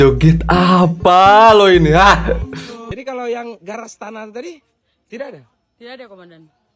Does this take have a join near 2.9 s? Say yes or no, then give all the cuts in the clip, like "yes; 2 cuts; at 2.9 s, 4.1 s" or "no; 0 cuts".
yes; 1 cut; at 2.9 s